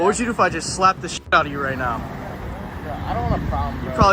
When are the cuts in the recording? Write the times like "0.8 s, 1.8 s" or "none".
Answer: 2.5 s